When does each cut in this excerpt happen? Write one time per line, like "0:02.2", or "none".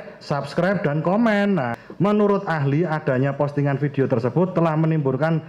0:01.8

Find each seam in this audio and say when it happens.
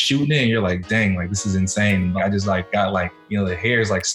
0:02.2
0:03.2

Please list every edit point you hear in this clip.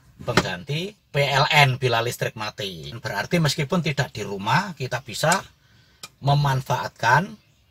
0:01.0

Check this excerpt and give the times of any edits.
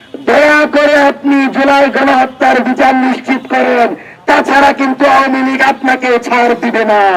none

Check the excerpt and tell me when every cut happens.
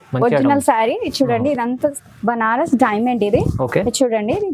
0:01.9

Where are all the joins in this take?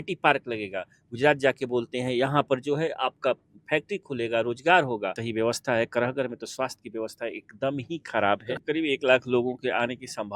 0:05.2
0:08.6

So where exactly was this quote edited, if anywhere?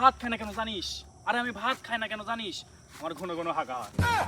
none

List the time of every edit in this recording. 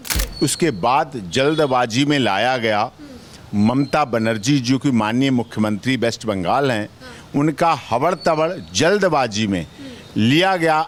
none

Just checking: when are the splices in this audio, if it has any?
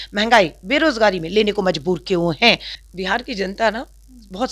0:02.7

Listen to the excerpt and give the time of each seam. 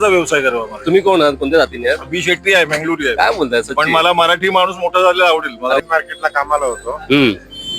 0:05.8

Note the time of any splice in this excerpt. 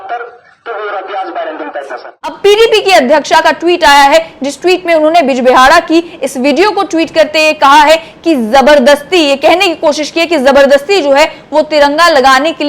0:02.4

